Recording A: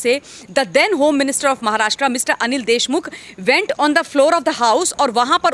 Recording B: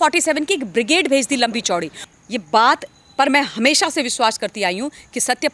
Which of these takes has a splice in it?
B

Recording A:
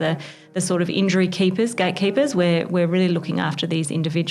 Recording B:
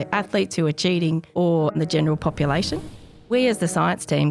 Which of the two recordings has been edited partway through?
B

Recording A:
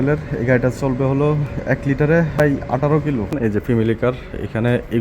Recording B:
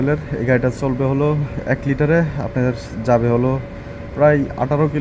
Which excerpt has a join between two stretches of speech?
A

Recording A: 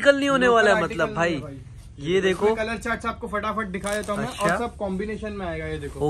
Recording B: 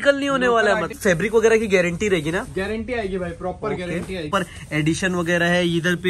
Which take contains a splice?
B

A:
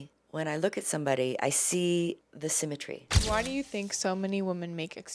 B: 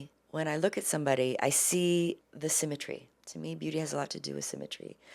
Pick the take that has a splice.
A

